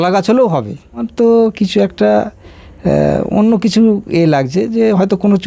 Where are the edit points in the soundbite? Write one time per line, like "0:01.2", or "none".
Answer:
0:01.0